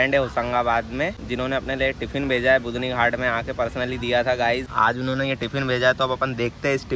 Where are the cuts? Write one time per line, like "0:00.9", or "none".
0:01.2
0:04.7